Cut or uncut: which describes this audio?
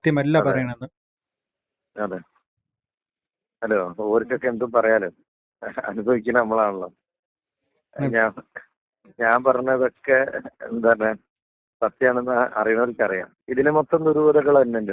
cut